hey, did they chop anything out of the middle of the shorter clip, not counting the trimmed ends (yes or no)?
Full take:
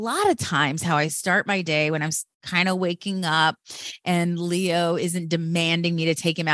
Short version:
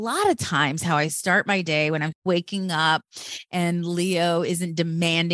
yes